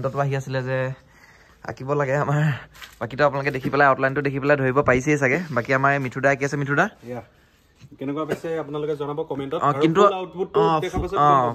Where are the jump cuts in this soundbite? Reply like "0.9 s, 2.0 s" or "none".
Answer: none